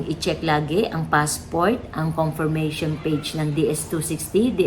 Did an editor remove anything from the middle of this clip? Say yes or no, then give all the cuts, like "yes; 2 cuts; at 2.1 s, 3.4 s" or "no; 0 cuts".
no; 0 cuts